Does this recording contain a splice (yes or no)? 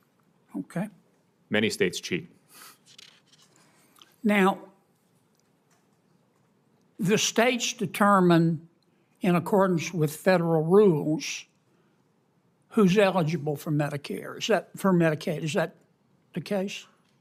no